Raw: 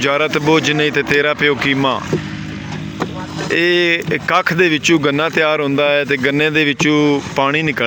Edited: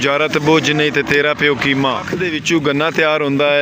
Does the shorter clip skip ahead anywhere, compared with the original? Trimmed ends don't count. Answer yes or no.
yes